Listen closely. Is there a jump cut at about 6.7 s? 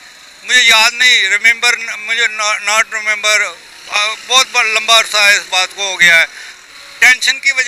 yes; 1 cut; at 6.7 s

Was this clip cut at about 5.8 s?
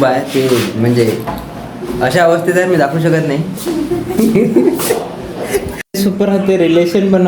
yes; 1 cut; at 5.8 s

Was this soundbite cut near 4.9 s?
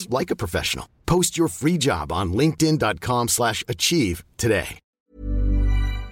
yes; 1 cut; at 4.9 s

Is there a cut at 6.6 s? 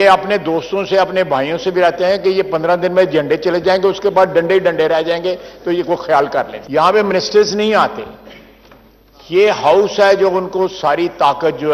yes; 1 cut; at 6.6 s

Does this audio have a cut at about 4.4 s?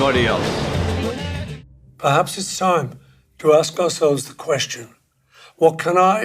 no; 1 cut; at 1.3 s

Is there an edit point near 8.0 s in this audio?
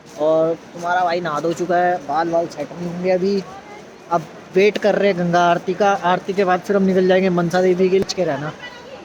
yes; 1 cut; at 8.0 s

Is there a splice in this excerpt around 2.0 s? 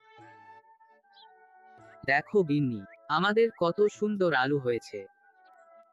yes; 2 cuts; at 2.0 s, 5.2 s

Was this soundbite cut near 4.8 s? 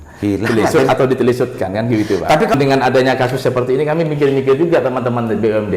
no; 1 cut; at 2.5 s

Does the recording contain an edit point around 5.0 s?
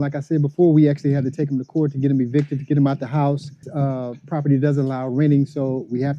no; 1 cut; at 3.7 s

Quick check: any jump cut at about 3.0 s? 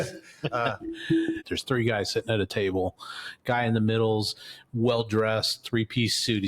no; 1 cut; at 1.4 s

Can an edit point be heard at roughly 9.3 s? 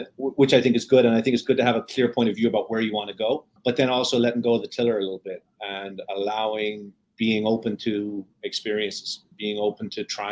yes; 1 cut; at 9.3 s

